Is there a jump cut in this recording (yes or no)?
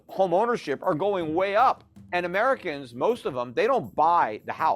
yes